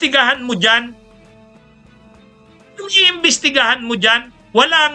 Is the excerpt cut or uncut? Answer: uncut